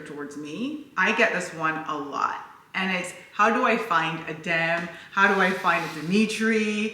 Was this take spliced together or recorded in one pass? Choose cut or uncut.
cut